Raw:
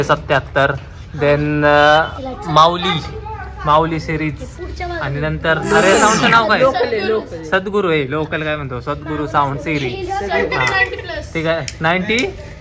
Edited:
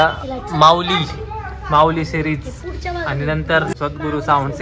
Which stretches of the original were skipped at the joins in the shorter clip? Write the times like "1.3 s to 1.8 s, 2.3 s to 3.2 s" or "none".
5.7 s to 8.8 s